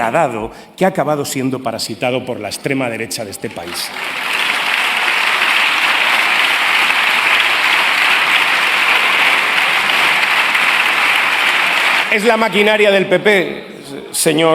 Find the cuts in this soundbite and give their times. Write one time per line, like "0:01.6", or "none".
0:12.1